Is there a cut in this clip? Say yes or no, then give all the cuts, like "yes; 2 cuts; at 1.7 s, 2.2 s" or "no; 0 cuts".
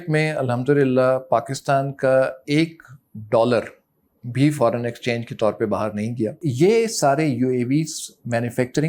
yes; 1 cut; at 6.4 s